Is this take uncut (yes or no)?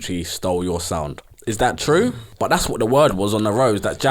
no